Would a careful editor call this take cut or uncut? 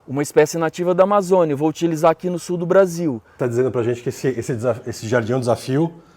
cut